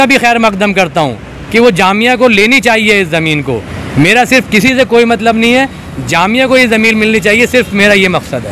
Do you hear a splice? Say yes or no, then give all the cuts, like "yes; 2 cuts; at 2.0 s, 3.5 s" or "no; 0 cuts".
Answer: no; 0 cuts